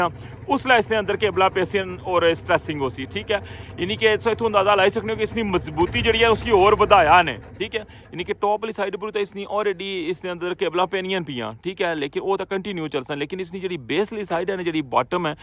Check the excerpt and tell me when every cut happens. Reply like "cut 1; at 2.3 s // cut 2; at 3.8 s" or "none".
none